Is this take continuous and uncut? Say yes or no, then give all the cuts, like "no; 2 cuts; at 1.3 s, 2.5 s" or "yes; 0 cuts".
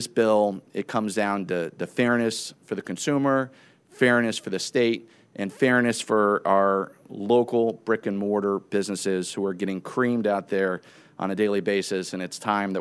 yes; 0 cuts